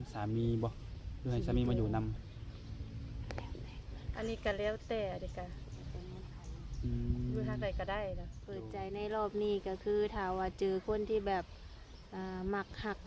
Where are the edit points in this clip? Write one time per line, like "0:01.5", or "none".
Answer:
0:08.6